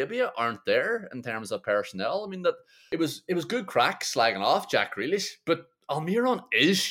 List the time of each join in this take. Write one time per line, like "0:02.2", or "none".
0:02.7